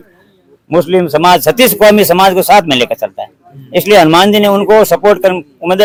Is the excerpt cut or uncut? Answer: uncut